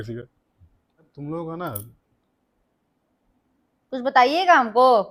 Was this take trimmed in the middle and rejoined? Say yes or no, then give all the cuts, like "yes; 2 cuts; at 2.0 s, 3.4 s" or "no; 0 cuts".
yes; 1 cut; at 1.1 s